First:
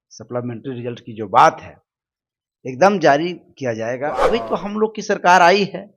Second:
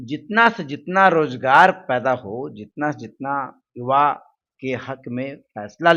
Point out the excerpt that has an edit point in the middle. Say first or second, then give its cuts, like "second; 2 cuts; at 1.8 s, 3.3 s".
first; 1 cut; at 4.3 s